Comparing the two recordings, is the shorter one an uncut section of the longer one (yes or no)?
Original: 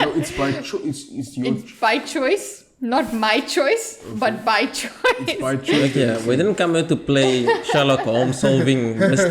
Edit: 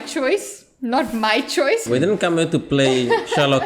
no